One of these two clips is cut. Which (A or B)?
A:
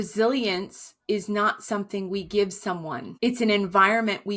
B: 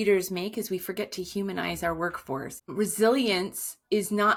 A